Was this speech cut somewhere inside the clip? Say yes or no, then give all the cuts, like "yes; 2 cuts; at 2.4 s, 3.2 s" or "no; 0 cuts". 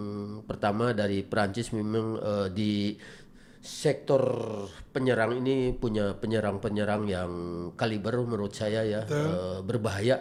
no; 0 cuts